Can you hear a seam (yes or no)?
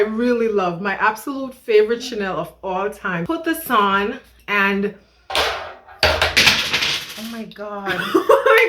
yes